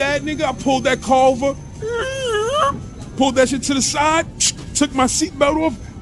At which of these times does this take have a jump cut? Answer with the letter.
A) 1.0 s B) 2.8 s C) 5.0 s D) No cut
D